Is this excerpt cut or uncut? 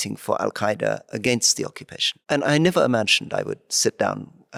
uncut